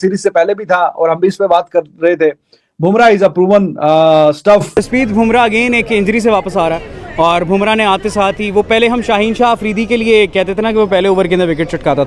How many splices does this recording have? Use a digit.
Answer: 1